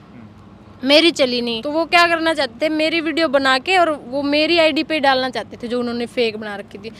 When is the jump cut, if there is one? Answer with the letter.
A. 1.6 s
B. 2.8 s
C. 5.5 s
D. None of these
A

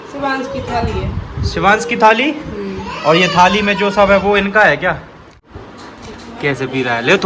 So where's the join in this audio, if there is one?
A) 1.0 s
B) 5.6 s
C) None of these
B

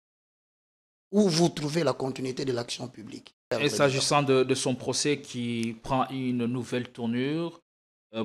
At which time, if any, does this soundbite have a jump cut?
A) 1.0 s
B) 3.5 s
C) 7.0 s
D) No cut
B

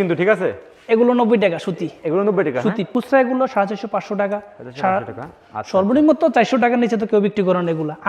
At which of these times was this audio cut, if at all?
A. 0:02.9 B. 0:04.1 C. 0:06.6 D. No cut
A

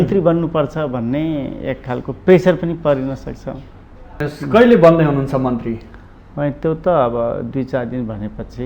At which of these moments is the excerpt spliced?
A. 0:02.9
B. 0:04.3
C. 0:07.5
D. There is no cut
B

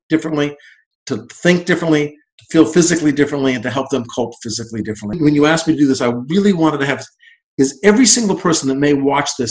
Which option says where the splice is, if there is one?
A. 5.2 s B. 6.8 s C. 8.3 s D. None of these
A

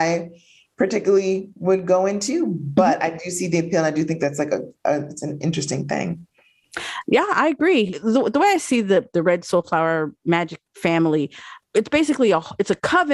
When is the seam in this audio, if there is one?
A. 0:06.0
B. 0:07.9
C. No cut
B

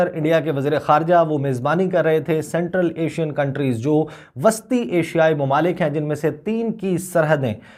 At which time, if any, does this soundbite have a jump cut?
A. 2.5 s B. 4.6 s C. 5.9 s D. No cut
D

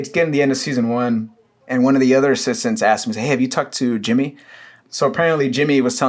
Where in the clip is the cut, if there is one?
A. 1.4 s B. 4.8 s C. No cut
B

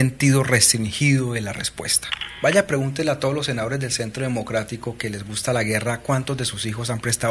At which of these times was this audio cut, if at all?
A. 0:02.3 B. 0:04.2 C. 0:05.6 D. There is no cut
A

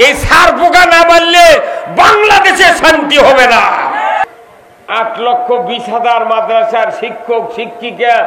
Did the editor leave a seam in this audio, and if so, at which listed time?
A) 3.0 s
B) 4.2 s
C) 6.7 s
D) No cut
B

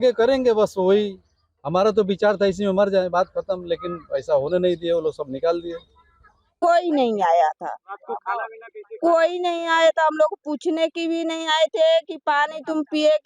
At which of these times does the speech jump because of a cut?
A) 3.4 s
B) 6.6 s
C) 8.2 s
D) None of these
B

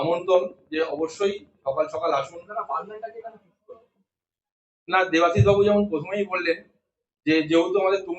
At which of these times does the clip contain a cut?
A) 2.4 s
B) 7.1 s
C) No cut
A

